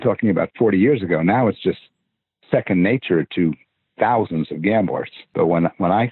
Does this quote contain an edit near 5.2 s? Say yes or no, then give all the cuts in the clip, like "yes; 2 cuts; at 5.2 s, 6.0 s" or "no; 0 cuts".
yes; 1 cut; at 5.2 s